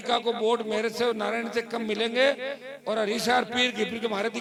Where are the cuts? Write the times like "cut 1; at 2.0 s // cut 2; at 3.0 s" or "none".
none